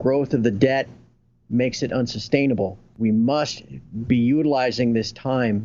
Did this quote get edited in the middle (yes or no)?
yes